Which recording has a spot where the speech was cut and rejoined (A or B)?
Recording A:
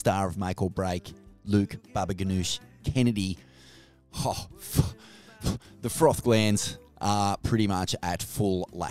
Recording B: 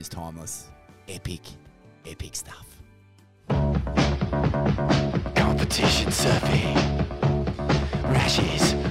B